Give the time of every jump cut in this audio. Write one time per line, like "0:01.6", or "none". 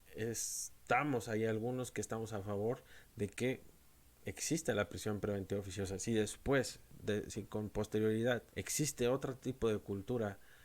0:06.9
0:08.6